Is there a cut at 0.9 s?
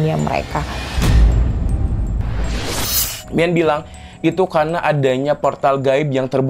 yes; 2 cuts; at 0.9 s, 3.0 s

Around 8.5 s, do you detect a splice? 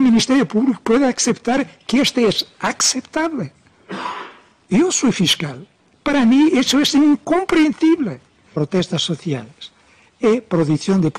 yes; 1 cut; at 8.5 s

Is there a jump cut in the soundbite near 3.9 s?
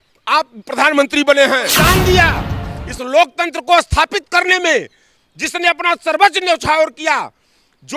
no; 1 cut; at 1.7 s

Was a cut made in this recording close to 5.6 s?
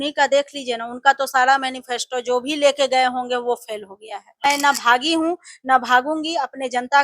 no; 1 cut; at 4.4 s

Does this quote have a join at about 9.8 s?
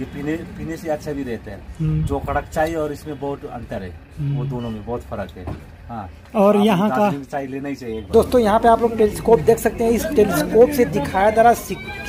no; 1 cut; at 8.0 s

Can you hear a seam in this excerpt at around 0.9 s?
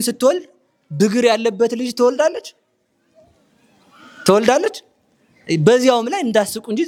no; 0 cuts

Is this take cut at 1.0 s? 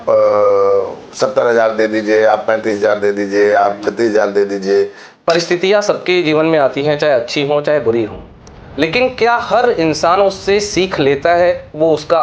no; 1 cut; at 5.0 s

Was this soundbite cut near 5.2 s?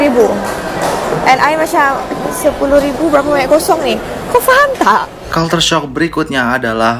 yes; 1 cut; at 5.2 s

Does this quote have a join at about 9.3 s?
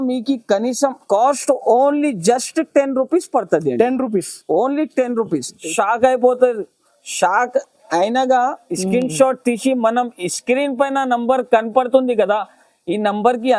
no; 2 cuts; at 1.0 s, 5.6 s

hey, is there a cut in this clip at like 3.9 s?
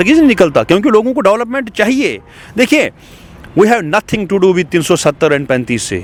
no; 0 cuts

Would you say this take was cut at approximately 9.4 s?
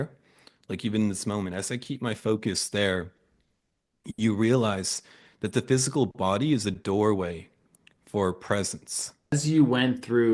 yes; 1 cut; at 9.4 s

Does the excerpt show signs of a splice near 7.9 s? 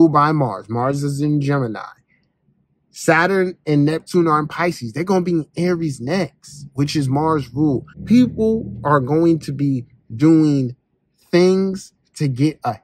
yes; 1 cut; at 7.9 s

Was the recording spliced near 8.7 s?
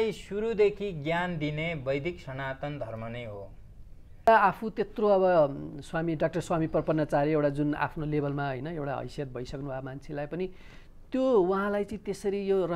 no; 1 cut; at 4.3 s

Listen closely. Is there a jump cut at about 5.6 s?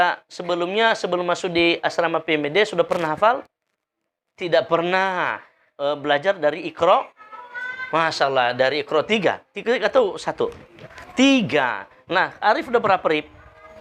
no; 0 cuts

